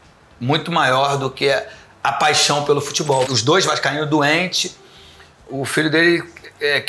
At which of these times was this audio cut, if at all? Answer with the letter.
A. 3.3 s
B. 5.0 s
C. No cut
A